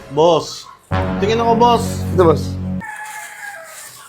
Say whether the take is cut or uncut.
cut